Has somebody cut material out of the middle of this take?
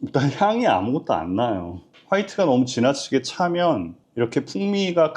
yes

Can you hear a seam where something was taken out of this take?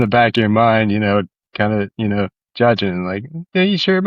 no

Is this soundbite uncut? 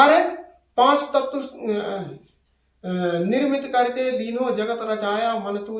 yes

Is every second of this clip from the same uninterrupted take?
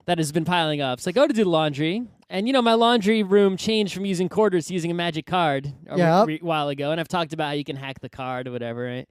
yes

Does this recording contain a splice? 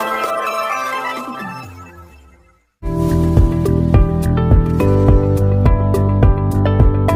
yes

